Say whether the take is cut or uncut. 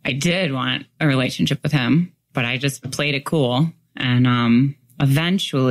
uncut